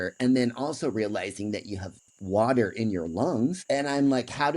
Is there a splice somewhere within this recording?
yes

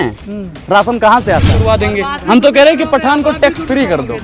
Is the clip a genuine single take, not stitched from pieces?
no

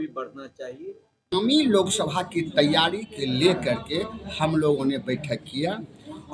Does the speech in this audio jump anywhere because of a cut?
yes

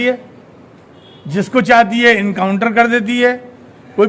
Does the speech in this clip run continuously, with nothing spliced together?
yes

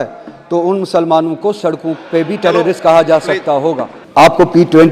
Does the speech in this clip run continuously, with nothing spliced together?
no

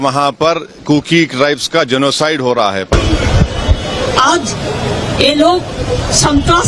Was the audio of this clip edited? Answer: yes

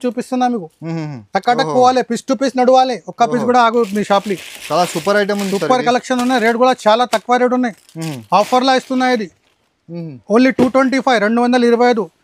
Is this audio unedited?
yes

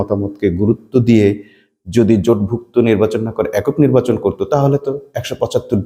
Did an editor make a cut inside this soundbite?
no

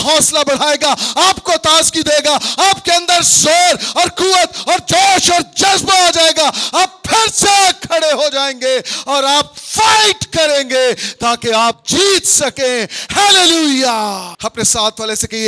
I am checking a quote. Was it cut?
yes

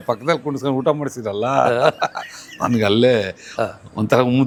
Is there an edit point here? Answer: no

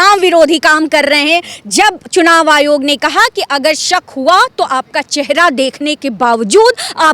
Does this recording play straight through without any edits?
yes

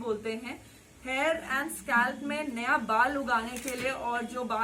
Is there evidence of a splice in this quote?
no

